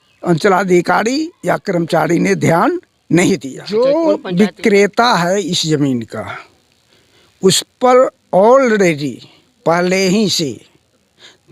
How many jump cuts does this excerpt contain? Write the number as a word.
one